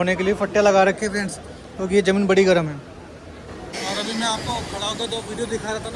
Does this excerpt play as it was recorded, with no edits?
no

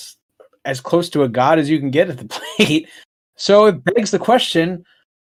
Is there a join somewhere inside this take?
no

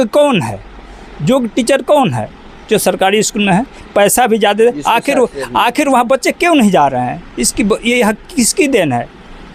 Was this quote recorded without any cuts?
yes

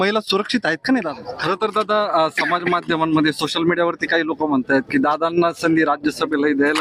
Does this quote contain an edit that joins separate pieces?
yes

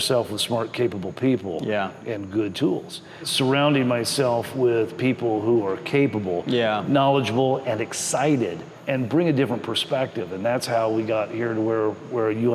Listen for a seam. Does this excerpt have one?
yes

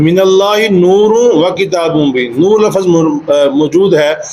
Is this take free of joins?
yes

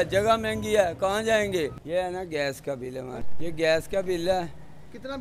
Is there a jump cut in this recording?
yes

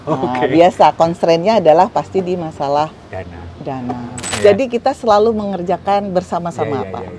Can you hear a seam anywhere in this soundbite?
yes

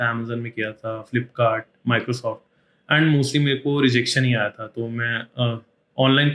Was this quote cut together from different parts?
no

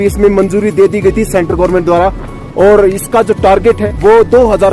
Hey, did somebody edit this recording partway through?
yes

